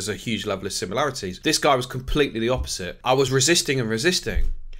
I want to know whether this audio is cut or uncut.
cut